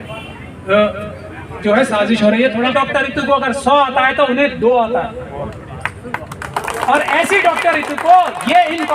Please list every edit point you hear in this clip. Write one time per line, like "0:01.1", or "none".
0:02.7